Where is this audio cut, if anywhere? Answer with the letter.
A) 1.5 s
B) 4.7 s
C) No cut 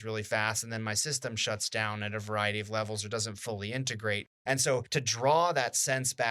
B